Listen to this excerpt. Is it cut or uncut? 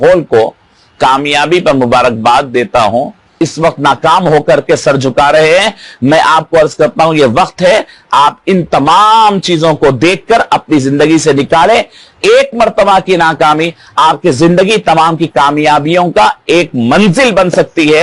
cut